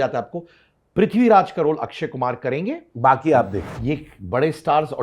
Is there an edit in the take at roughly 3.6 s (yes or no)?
yes